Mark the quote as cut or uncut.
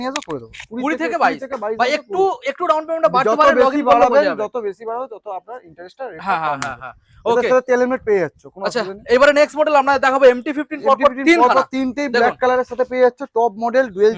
uncut